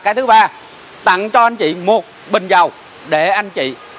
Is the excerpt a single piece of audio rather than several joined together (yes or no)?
yes